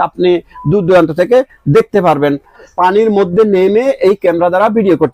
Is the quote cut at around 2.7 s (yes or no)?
yes